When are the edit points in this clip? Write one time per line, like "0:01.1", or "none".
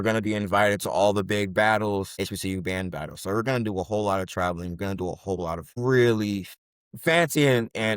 0:02.1
0:05.8
0:06.5